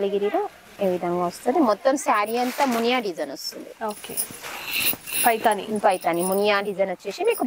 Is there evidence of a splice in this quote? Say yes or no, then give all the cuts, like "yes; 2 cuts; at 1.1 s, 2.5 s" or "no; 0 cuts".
no; 0 cuts